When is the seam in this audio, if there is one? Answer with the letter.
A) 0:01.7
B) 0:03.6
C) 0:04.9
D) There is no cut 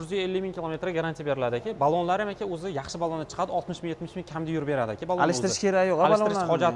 D